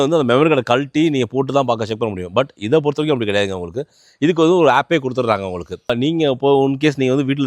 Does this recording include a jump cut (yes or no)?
yes